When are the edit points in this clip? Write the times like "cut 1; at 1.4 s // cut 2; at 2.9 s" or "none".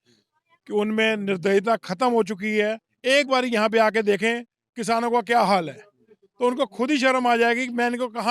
none